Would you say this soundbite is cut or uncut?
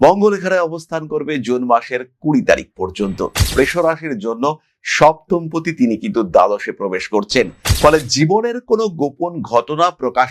cut